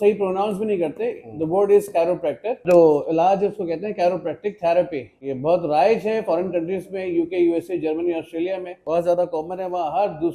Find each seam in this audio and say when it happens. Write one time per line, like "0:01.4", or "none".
0:02.6
0:05.3
0:08.7